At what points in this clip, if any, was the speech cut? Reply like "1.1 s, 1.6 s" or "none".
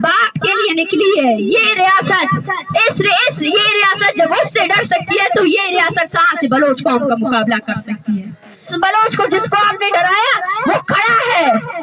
8.7 s